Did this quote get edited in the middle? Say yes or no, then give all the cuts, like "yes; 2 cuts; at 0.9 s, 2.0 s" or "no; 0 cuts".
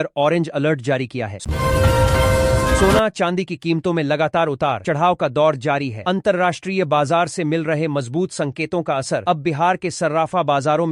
yes; 2 cuts; at 1.4 s, 2.8 s